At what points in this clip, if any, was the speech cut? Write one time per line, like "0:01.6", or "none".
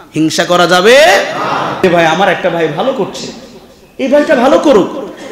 0:01.8